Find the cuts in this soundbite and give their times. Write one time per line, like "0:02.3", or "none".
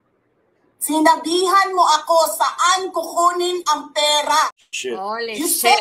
0:04.7